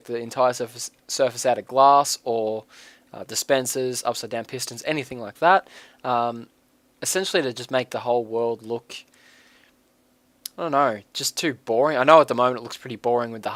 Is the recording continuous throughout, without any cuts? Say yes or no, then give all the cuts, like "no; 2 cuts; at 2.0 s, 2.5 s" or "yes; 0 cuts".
yes; 0 cuts